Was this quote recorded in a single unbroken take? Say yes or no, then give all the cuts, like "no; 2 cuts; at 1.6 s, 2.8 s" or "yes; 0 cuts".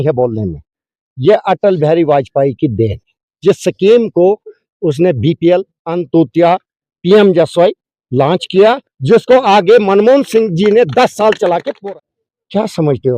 no; 1 cut; at 11.7 s